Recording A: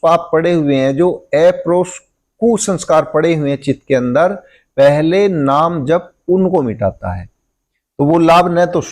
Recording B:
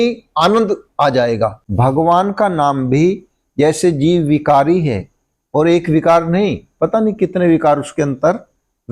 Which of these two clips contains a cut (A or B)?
B